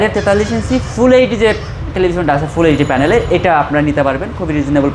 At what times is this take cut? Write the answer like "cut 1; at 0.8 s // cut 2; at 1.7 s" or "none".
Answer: none